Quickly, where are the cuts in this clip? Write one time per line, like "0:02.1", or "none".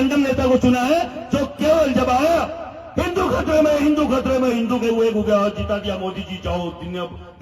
none